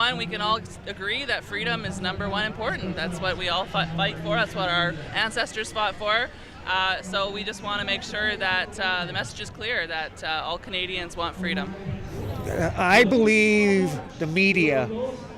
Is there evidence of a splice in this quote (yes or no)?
yes